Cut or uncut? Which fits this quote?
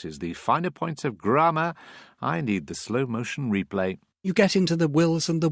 uncut